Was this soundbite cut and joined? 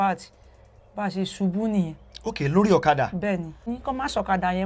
yes; 1 cut; at 3.7 s

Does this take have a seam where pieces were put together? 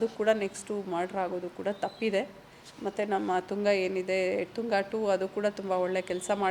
no; 0 cuts

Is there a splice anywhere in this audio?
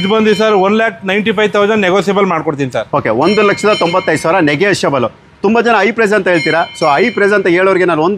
no; 0 cuts

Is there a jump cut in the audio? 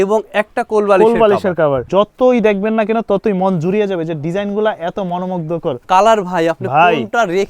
yes; 2 cuts; at 1.8 s, 5.8 s

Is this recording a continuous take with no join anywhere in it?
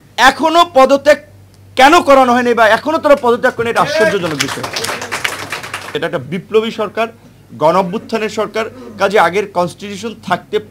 no; 1 cut; at 5.9 s

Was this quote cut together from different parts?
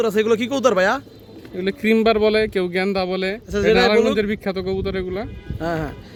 no; 0 cuts

